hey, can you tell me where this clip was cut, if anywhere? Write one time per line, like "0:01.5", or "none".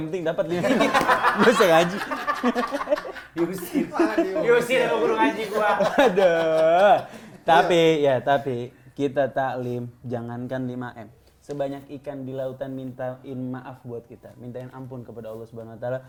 none